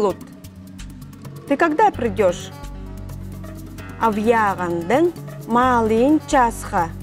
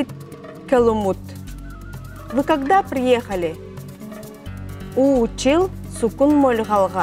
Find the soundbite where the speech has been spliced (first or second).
first